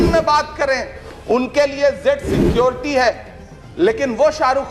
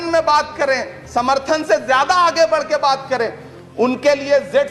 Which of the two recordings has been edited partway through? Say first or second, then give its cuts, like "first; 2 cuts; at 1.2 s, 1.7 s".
first; 1 cut; at 1.0 s